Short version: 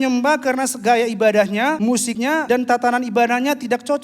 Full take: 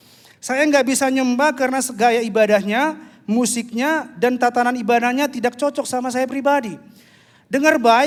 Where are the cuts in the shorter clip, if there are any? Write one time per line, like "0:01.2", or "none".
0:02.1